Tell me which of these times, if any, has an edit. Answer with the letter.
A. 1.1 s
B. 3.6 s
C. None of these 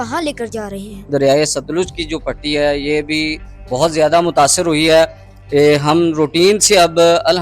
A